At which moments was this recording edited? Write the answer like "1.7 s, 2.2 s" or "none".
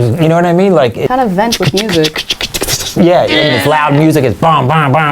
1.1 s

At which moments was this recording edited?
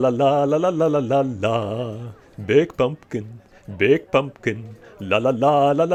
none

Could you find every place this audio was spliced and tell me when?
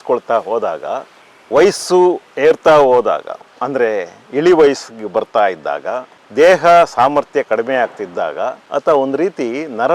8.6 s

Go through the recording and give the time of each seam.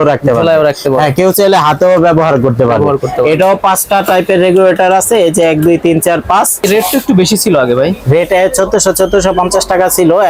6.6 s

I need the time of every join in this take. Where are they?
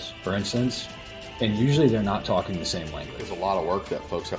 3.2 s

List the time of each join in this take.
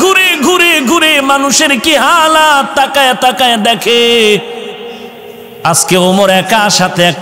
none

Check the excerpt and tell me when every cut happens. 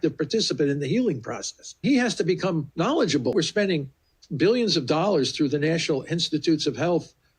1.8 s, 3.3 s

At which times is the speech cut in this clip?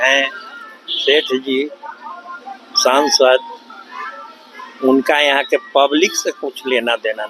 none

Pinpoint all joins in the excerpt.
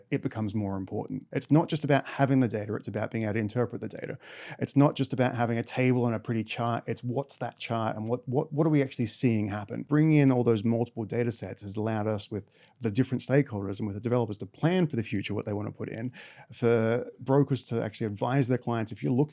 1.2 s, 9.8 s

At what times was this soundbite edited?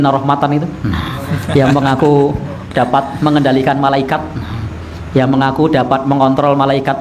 none

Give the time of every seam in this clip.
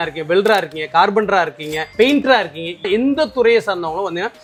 none

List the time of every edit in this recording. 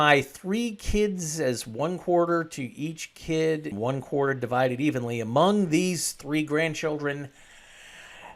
3.7 s

